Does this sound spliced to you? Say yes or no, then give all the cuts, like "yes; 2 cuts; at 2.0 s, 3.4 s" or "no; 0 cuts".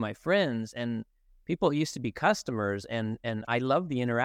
no; 0 cuts